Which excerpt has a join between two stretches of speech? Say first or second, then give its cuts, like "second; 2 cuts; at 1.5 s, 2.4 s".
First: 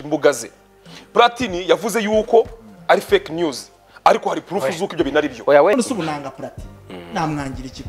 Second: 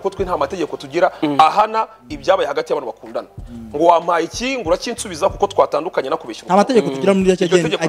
first; 1 cut; at 5.7 s